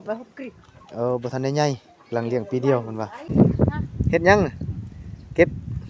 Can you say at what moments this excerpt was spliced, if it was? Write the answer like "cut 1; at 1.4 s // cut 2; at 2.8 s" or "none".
cut 1; at 3.2 s